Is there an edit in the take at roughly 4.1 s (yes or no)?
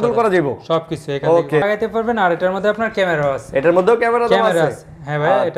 no